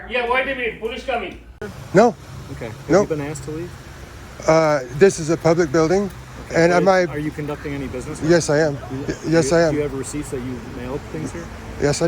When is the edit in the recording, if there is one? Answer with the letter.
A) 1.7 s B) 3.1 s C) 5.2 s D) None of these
A